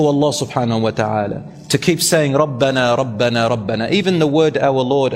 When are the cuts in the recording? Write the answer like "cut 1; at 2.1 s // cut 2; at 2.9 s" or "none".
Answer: none